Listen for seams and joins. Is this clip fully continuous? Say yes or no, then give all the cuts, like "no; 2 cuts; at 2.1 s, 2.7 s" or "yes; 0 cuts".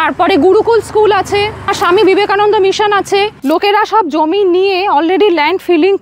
no; 2 cuts; at 1.7 s, 3.4 s